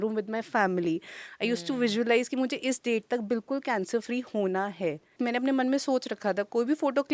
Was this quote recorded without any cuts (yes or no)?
no